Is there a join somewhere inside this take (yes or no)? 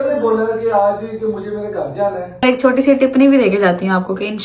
yes